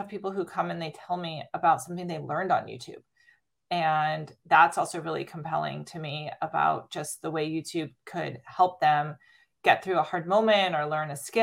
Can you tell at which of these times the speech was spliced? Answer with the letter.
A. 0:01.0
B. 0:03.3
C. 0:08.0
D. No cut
C